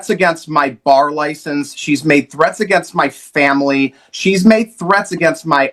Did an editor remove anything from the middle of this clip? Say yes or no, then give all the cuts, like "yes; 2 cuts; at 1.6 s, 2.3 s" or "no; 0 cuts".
no; 0 cuts